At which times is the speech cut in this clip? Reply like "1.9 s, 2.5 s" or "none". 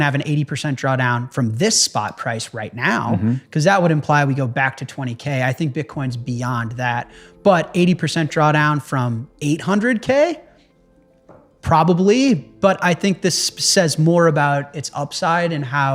none